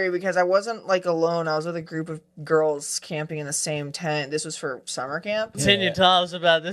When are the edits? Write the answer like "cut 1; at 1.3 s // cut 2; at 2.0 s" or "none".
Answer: cut 1; at 5.5 s